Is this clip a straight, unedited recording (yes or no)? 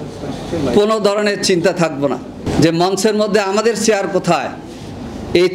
no